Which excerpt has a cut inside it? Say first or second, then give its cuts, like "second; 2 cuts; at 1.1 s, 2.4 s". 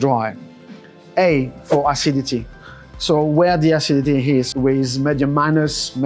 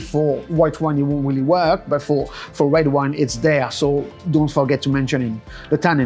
first; 1 cut; at 4.5 s